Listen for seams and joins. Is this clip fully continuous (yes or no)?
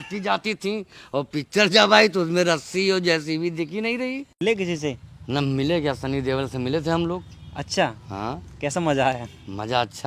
no